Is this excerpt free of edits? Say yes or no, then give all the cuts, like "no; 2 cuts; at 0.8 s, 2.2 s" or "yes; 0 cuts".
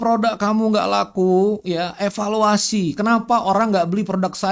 yes; 0 cuts